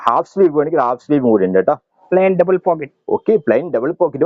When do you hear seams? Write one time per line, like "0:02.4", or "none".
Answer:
0:01.9